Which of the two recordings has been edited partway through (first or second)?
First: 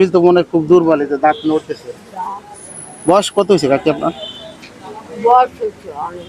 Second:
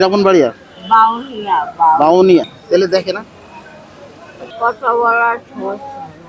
second